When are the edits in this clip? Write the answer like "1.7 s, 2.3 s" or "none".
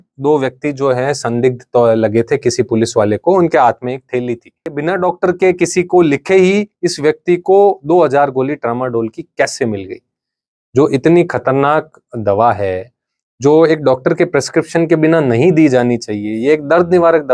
4.8 s